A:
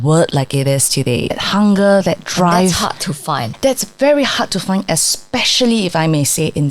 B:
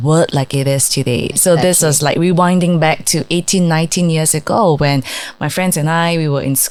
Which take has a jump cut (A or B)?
A